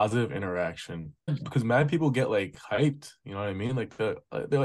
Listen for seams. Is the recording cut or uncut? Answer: cut